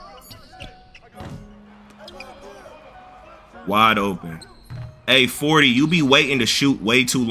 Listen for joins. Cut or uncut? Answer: uncut